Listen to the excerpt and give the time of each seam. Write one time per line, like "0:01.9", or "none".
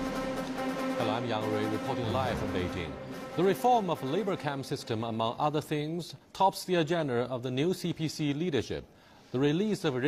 none